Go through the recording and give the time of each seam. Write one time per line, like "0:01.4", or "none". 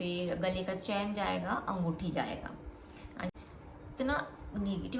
0:03.3